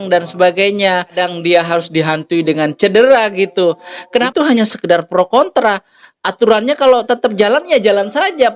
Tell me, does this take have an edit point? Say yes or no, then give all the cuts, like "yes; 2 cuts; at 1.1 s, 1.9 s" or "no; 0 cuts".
yes; 2 cuts; at 1.1 s, 4.3 s